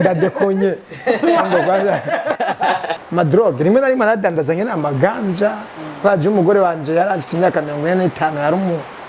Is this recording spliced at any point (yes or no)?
yes